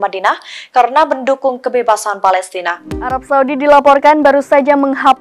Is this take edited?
yes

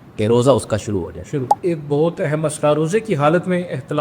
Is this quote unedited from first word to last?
no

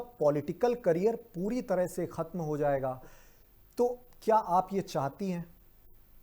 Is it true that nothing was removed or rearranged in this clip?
yes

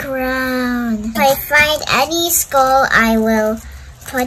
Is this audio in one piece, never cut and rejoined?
no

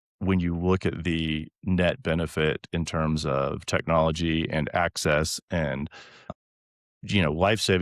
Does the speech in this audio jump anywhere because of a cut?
no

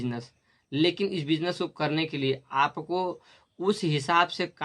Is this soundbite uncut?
yes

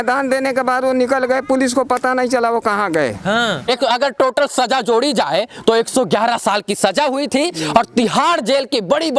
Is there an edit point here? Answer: yes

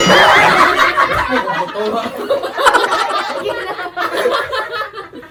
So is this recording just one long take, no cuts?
yes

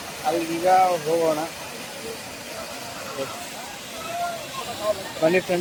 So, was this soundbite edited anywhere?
no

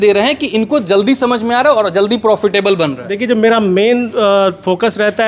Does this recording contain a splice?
no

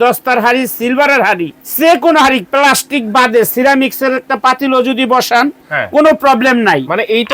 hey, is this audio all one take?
no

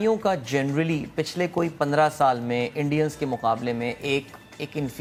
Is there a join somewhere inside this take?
no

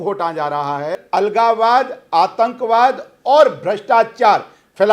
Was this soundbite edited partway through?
yes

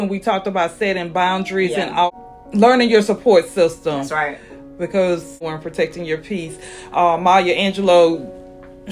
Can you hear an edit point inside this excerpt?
yes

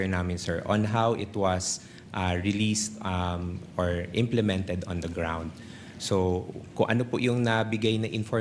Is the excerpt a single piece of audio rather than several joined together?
yes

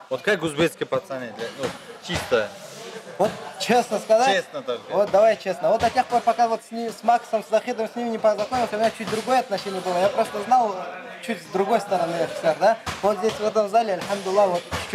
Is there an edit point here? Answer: no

